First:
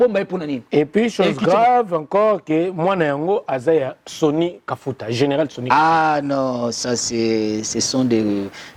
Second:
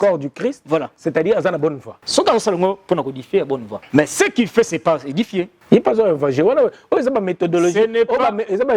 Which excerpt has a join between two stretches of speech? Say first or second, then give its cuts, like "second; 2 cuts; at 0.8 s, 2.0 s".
second; 3 cuts; at 1.9 s, 3.7 s, 5.6 s